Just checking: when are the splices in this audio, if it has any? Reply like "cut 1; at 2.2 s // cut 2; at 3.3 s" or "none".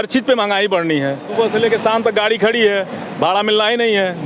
cut 1; at 1.3 s